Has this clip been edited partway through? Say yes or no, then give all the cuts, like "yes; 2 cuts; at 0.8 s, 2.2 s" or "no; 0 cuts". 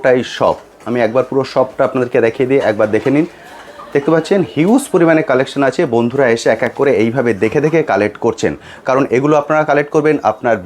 no; 0 cuts